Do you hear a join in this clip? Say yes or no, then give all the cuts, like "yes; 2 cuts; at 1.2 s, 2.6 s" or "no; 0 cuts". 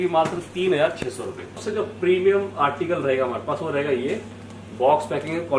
yes; 1 cut; at 1.6 s